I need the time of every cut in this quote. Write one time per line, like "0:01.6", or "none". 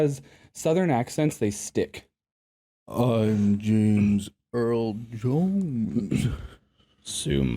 0:02.8